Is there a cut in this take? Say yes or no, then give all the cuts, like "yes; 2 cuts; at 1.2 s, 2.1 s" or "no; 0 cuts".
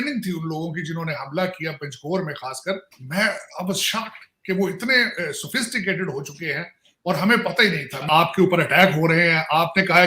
yes; 2 cuts; at 2.9 s, 8.0 s